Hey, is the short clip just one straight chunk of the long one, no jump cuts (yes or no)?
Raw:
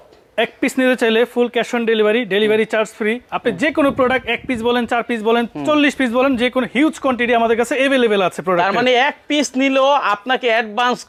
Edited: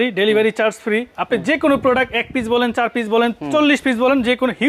yes